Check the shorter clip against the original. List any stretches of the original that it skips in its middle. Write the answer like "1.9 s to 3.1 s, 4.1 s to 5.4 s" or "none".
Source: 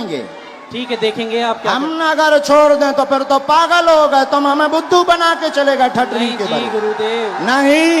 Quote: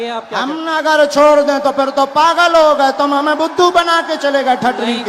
none